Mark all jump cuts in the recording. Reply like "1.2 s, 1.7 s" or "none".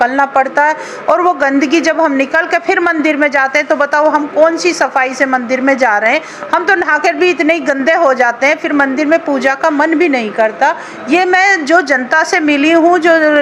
none